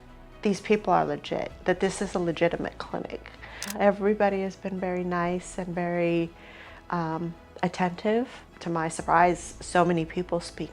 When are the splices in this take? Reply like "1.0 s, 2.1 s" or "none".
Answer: 3.7 s, 8.5 s